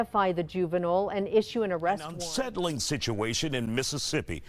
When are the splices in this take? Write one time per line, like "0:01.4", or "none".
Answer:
0:02.3